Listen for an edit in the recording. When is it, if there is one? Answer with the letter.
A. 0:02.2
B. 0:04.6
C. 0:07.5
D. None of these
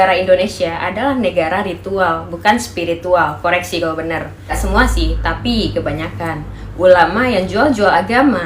B